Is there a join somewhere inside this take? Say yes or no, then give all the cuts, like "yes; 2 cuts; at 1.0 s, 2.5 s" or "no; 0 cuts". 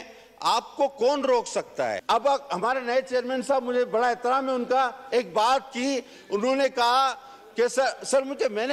yes; 1 cut; at 2.0 s